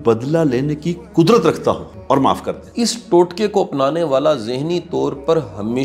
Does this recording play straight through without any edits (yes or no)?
no